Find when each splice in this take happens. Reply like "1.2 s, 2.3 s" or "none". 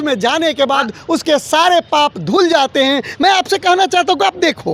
none